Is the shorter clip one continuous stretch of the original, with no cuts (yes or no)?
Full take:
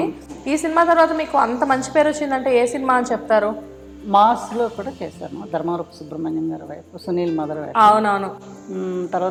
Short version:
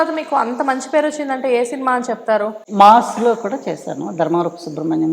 no